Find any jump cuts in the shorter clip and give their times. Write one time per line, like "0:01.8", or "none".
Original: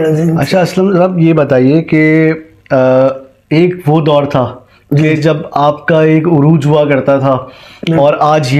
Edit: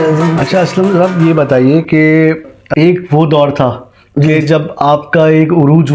0:02.5